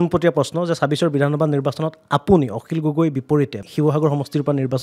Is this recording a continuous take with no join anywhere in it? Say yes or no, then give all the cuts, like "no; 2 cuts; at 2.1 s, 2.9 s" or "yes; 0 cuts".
no; 1 cut; at 3.6 s